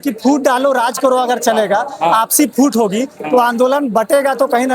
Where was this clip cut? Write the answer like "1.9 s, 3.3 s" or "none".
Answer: none